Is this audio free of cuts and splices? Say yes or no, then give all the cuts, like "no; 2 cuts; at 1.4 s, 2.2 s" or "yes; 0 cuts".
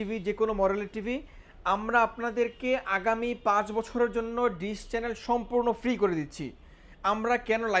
yes; 0 cuts